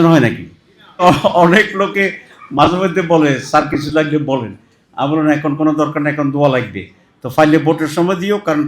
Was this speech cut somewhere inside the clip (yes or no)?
yes